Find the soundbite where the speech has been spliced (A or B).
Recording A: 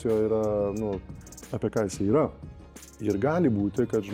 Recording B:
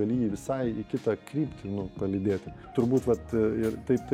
B